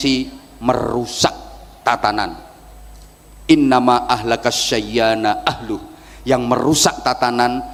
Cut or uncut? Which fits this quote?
uncut